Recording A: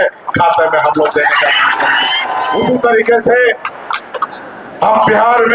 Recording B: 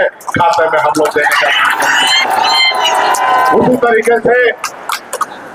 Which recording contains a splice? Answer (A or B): A